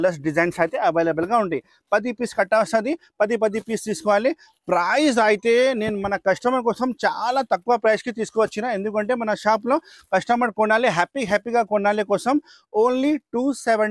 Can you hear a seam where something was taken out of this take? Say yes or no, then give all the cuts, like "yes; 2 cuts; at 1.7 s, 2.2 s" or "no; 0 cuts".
no; 0 cuts